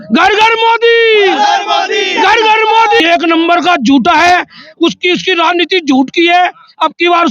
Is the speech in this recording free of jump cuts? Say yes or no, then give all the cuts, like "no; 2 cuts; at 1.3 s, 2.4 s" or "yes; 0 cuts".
no; 1 cut; at 3.0 s